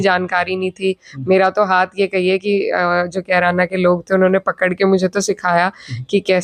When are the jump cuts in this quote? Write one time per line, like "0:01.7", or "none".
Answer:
none